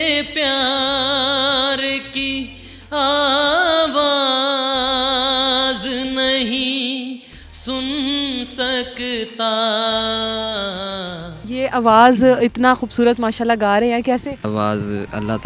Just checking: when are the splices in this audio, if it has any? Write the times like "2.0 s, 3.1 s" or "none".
11.5 s, 14.5 s